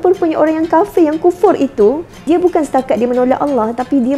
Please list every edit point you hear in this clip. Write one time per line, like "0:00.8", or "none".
0:02.1